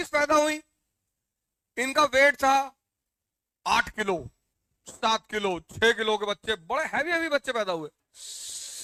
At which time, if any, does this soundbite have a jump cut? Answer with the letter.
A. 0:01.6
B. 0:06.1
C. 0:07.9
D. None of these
D